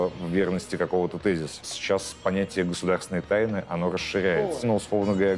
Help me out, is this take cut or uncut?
cut